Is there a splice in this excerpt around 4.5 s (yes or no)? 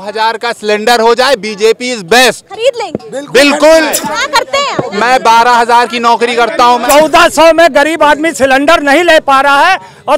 yes